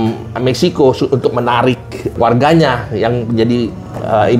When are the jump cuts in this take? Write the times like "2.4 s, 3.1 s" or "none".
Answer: 2.2 s